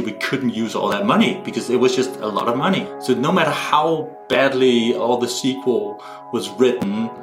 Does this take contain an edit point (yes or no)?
yes